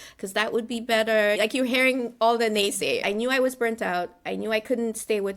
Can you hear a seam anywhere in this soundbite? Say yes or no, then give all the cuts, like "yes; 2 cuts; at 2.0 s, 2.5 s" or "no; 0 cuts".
yes; 1 cut; at 3.0 s